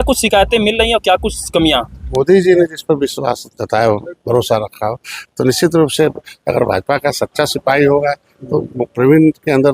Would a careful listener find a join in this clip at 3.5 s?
no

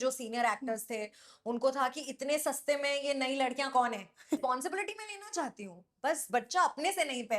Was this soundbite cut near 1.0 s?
no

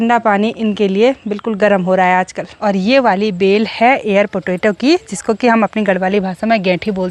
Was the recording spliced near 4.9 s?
no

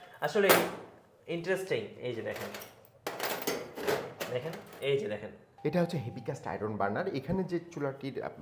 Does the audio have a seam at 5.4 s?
yes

